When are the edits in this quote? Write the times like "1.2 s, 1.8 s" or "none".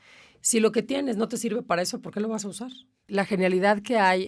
3.0 s